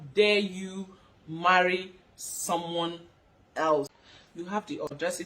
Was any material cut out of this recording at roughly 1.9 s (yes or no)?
no